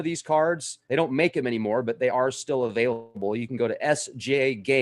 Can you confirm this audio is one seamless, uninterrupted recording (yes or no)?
no